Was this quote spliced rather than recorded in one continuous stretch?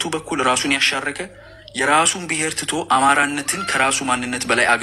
no; 0 cuts

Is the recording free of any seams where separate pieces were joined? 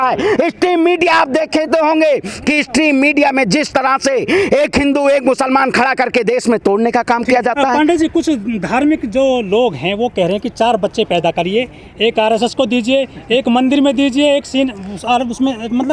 yes; 0 cuts

